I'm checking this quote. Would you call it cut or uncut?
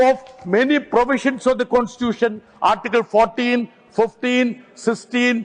uncut